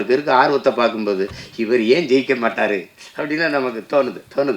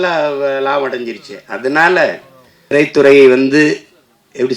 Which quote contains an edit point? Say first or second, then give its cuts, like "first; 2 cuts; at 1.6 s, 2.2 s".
second; 1 cut; at 2.7 s